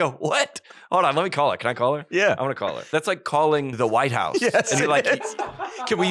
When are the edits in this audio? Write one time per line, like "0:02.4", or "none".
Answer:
0:02.9
0:03.7